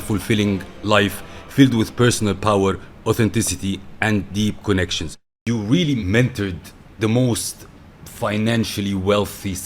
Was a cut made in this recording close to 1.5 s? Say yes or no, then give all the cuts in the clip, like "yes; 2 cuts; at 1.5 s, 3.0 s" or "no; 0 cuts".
no; 1 cut; at 5.4 s